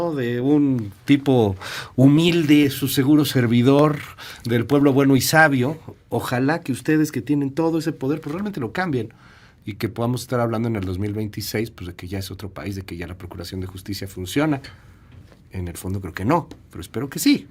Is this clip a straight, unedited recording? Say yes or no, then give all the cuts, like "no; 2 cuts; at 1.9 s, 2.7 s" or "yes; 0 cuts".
yes; 0 cuts